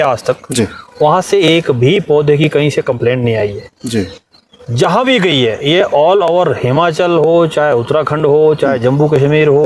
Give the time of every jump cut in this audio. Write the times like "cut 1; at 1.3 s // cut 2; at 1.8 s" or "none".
none